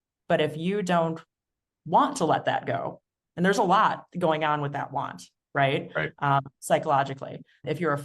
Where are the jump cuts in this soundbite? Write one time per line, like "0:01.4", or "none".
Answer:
none